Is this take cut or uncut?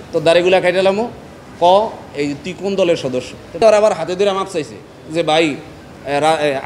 cut